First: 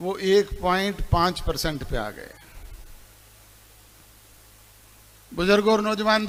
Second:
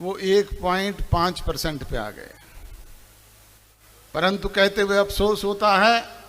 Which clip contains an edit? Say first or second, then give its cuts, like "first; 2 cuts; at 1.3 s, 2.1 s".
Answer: second; 1 cut; at 3.8 s